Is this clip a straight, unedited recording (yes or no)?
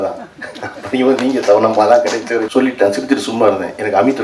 no